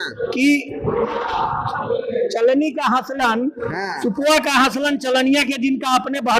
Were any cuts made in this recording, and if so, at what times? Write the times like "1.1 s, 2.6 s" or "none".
none

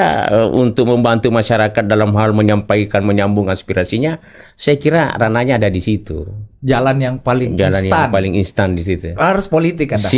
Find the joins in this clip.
none

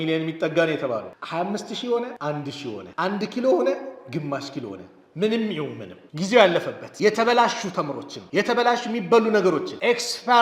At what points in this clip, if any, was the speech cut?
1.1 s

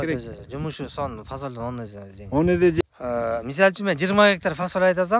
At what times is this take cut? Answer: 2.8 s

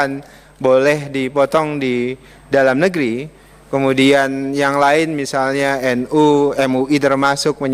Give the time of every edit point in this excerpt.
none

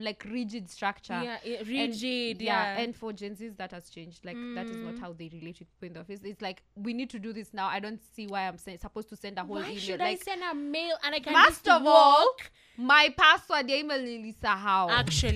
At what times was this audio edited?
none

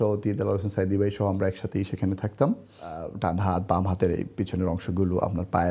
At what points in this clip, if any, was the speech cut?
3.1 s

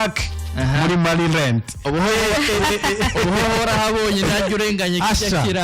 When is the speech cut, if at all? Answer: none

